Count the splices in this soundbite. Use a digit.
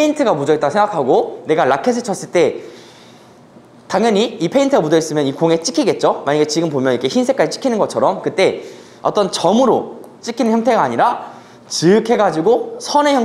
0